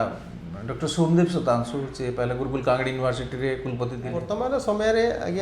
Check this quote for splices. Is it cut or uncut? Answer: cut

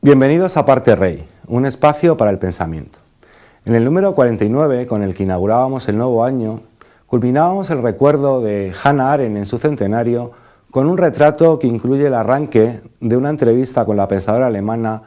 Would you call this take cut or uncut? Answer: cut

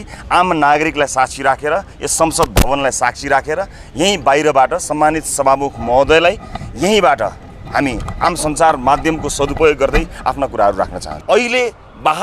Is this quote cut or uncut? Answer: cut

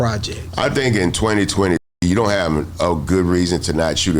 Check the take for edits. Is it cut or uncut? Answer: uncut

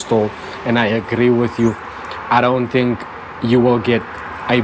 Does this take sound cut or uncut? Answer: uncut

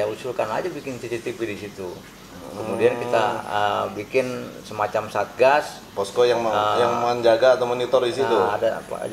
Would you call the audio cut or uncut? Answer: uncut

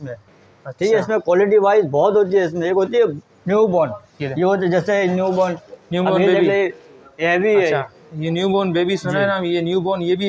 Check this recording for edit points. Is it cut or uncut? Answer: uncut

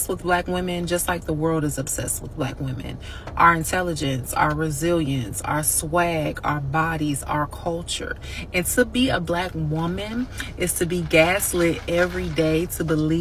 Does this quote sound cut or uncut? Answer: uncut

